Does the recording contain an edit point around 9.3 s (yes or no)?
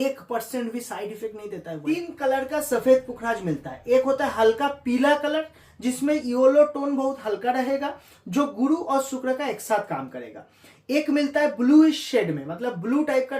no